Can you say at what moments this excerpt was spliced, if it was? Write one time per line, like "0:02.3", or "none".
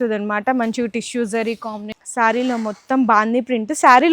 0:01.9